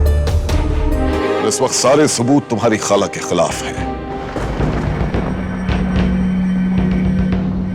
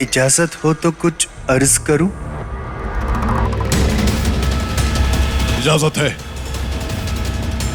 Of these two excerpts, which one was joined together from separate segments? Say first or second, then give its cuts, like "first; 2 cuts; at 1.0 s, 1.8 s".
first; 1 cut; at 1.0 s